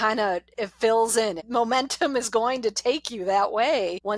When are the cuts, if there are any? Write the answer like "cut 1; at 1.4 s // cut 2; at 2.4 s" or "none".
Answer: cut 1; at 1.4 s